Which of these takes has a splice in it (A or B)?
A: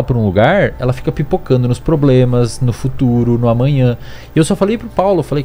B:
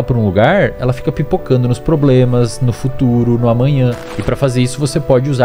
B